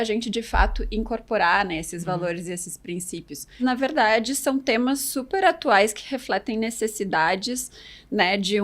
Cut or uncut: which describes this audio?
cut